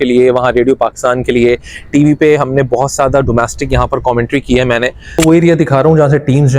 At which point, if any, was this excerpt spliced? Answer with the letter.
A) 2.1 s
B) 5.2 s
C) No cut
B